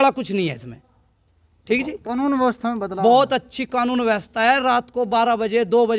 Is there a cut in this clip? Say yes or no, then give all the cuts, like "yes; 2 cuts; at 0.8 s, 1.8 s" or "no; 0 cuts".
no; 0 cuts